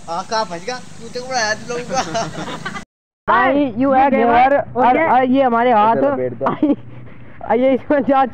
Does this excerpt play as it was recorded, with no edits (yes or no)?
no